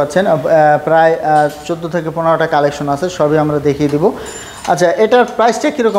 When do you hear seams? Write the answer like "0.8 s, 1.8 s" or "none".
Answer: none